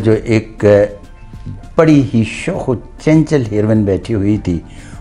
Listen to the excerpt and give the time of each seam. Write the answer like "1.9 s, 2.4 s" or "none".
none